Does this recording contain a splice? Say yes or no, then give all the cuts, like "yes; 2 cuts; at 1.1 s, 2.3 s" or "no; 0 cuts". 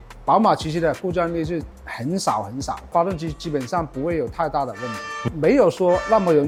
no; 0 cuts